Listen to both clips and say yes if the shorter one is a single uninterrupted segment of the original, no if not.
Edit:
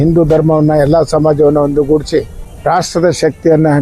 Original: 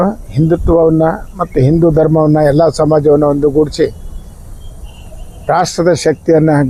no